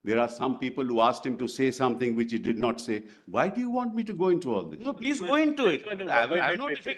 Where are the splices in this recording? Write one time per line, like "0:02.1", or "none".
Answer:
none